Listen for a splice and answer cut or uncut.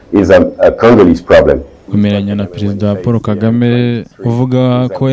cut